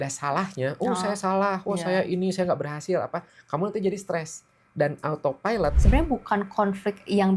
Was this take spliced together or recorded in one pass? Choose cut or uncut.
cut